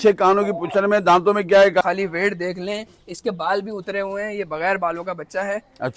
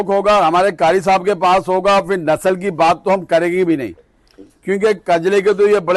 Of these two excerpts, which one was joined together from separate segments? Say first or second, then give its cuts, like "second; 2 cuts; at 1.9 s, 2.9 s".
first; 1 cut; at 1.8 s